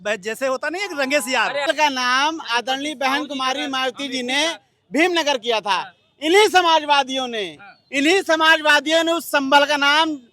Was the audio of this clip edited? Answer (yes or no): yes